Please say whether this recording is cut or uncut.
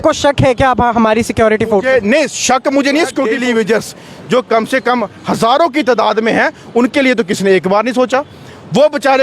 cut